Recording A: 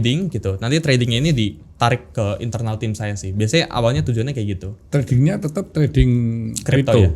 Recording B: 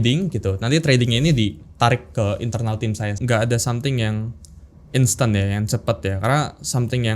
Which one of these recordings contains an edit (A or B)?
B